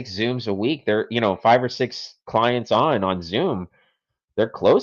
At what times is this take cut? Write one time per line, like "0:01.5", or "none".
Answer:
none